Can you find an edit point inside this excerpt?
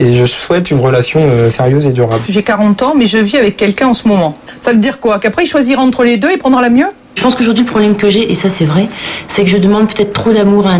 yes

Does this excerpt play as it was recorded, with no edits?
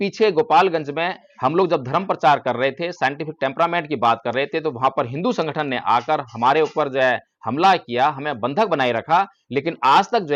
yes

